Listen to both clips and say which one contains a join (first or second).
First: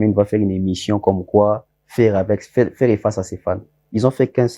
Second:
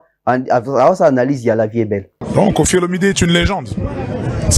second